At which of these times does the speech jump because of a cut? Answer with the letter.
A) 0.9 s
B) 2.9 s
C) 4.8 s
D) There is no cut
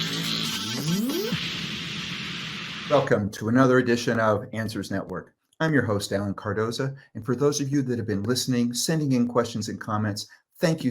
B